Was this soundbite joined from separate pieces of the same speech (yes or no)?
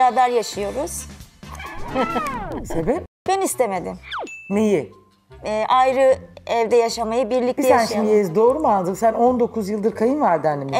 no